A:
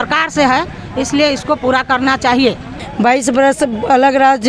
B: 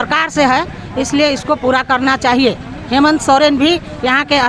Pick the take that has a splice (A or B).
A